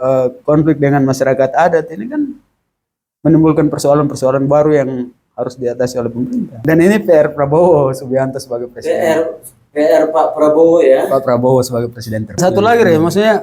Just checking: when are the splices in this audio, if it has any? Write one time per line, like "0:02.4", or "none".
0:06.6
0:12.4